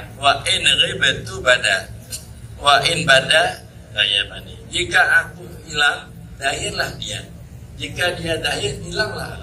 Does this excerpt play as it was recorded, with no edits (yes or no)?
yes